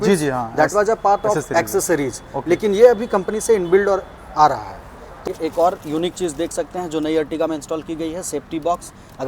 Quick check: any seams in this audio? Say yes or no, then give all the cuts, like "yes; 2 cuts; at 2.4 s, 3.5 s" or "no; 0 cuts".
yes; 1 cut; at 5.3 s